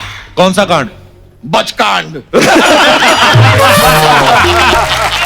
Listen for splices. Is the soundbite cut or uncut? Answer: uncut